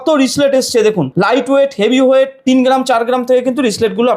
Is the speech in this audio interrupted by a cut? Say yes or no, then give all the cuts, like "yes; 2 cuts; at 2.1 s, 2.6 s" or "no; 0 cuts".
yes; 2 cuts; at 1.1 s, 2.4 s